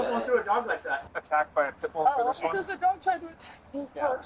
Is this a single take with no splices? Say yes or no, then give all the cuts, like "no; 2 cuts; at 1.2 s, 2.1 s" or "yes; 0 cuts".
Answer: no; 2 cuts; at 1.0 s, 2.0 s